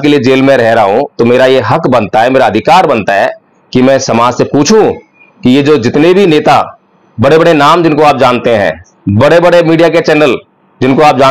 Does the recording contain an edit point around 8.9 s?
no; 0 cuts

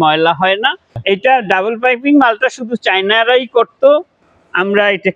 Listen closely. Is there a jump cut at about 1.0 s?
yes; 1 cut; at 1.0 s

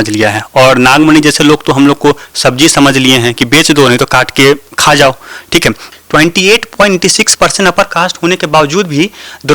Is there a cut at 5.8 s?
yes; 1 cut; at 5.8 s

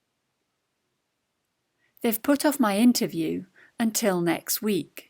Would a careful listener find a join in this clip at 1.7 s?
yes; 1 cut; at 1.7 s

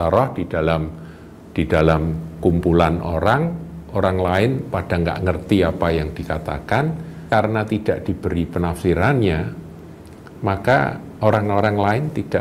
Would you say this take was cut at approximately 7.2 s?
yes; 1 cut; at 7.2 s

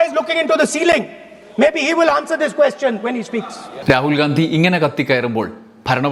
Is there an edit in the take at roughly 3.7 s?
yes; 1 cut; at 3.7 s

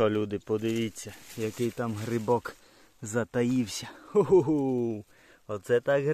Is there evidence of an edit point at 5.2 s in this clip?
no; 0 cuts

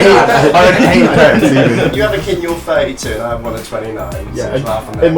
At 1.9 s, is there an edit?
yes; 1 cut; at 1.9 s

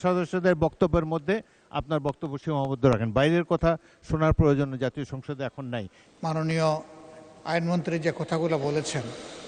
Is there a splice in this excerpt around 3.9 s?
no; 1 cut; at 6.0 s

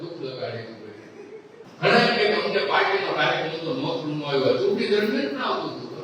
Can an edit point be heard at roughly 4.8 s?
no; 1 cut; at 1.7 s

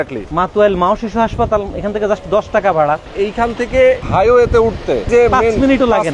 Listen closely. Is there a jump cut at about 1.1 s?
no; 3 cuts; at 3.1 s, 4.0 s, 5.1 s

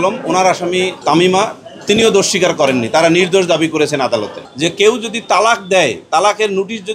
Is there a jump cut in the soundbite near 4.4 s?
yes; 2 cuts; at 1.0 s, 4.4 s

